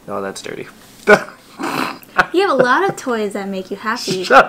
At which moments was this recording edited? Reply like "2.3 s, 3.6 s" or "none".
2.0 s